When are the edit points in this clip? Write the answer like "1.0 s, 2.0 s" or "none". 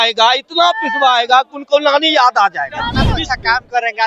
3.0 s